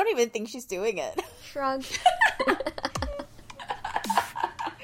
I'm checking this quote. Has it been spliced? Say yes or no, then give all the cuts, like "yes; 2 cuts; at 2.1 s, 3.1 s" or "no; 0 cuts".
yes; 1 cut; at 1.4 s